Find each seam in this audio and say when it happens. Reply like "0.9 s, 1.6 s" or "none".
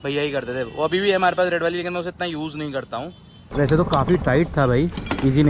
3.5 s